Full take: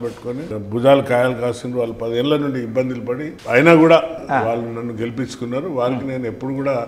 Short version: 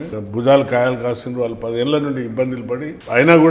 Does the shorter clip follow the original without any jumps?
yes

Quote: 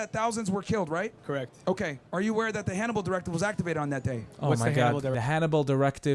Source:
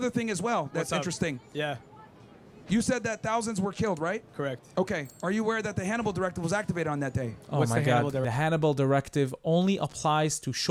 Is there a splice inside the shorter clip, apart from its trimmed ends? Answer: no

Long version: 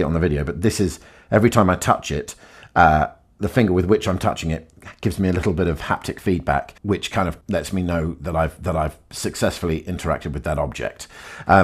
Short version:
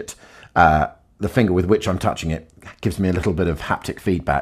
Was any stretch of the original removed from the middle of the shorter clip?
no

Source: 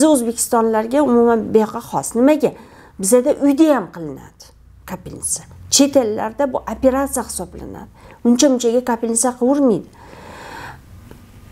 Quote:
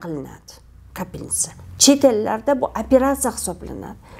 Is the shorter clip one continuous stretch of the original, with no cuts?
yes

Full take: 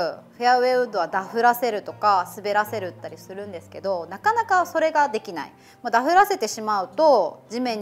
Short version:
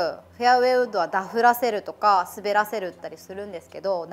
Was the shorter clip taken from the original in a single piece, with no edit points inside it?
yes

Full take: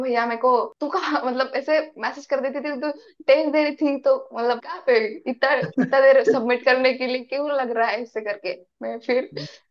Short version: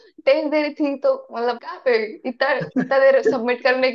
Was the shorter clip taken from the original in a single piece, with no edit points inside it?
yes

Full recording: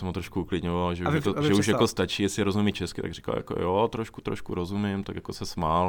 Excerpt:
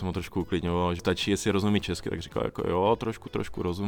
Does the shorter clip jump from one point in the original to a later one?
yes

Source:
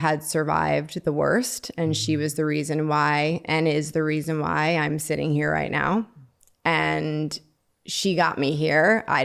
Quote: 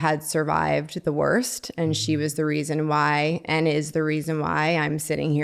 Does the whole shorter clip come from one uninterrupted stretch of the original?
yes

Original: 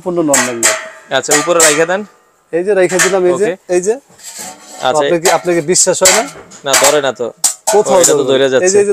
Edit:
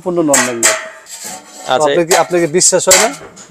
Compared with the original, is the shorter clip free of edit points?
no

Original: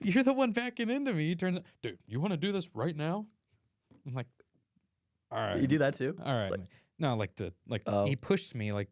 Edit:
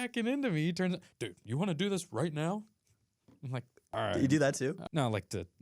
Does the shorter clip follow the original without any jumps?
no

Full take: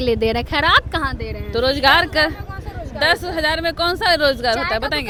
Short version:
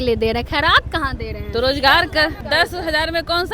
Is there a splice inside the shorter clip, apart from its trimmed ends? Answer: yes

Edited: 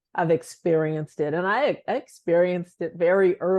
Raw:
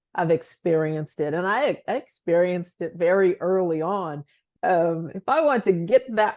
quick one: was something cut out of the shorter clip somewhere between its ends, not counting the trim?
no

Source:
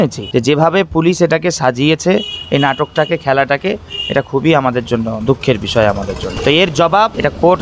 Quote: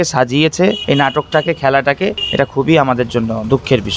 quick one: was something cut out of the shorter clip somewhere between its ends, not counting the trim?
yes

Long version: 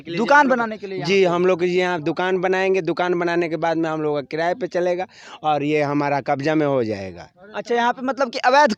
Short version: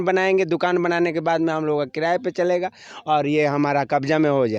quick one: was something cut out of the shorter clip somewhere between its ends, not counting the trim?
no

